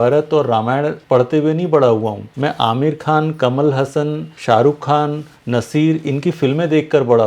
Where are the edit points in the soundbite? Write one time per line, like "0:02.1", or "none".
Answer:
0:01.0
0:02.2
0:04.3